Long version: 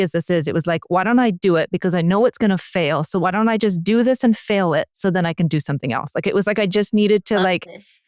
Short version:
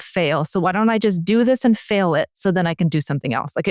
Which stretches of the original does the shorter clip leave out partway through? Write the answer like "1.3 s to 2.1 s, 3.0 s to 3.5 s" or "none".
none